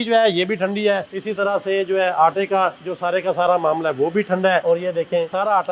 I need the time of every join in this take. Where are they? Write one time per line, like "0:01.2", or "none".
none